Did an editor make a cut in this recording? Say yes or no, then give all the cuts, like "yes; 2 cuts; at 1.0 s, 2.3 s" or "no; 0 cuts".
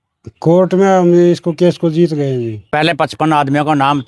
yes; 1 cut; at 2.9 s